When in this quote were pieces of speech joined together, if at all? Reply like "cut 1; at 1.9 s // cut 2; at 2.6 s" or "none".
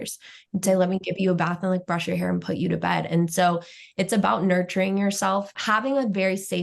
cut 1; at 5.5 s